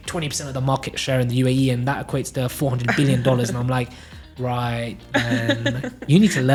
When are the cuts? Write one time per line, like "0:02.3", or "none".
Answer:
none